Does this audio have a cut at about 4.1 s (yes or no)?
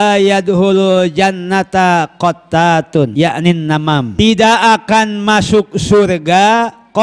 yes